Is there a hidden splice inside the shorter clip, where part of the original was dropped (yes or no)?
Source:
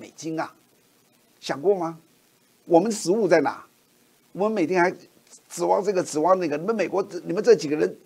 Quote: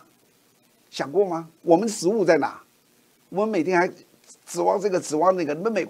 yes